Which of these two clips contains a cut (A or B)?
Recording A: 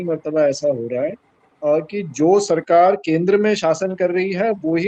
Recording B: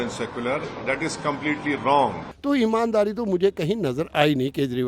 B